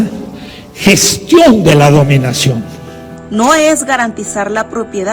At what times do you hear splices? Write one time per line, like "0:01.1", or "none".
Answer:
0:03.2